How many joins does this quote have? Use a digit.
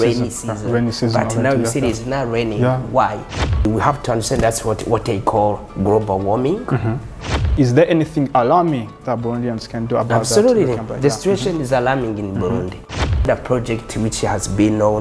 3